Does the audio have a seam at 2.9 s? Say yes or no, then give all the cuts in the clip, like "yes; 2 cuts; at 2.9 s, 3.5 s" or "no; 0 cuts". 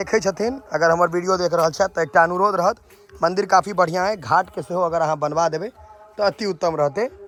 no; 0 cuts